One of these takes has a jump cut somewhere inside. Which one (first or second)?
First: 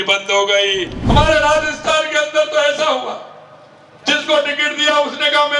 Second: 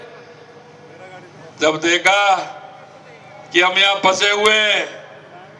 first